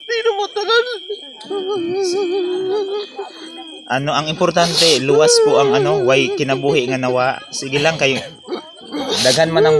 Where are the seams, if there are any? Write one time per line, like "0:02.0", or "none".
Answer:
none